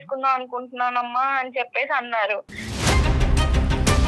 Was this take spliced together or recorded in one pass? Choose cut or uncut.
cut